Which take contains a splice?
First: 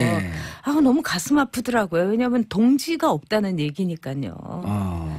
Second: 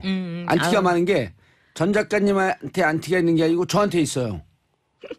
first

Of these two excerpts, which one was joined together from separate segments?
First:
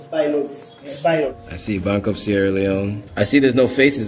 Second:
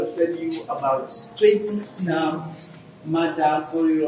first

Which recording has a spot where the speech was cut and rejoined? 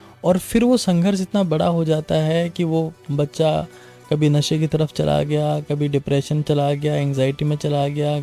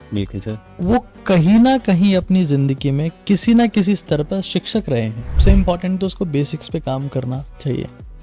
second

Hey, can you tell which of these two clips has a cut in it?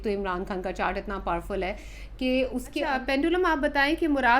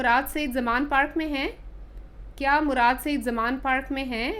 first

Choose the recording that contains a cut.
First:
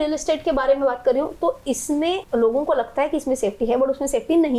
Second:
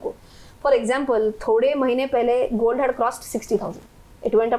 first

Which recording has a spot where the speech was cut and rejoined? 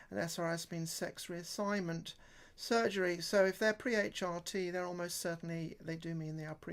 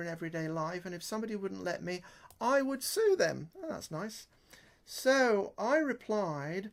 first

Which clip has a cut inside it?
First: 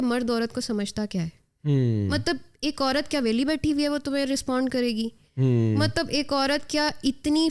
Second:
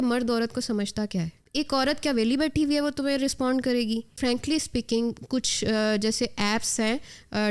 second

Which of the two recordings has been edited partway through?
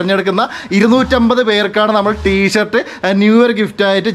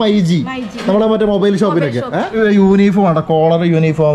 second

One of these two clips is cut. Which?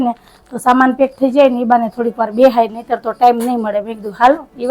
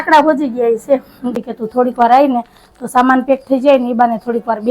second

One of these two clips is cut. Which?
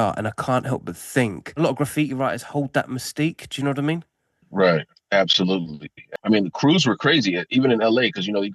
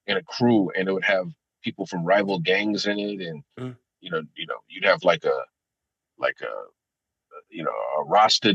first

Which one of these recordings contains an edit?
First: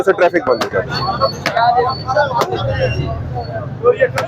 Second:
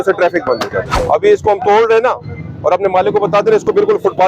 second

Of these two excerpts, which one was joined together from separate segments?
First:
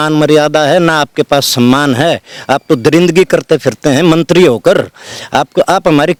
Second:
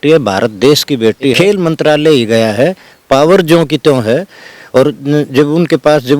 second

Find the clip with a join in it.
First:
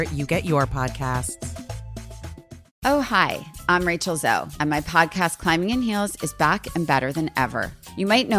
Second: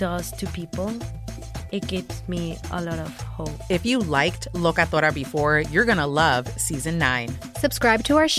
first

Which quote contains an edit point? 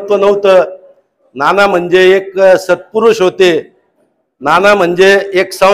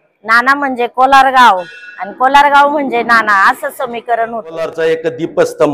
second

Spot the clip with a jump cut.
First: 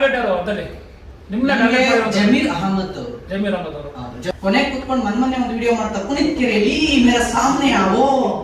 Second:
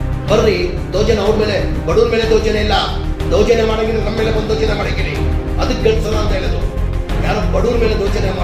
first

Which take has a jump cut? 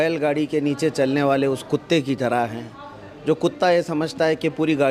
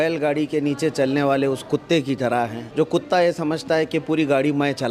second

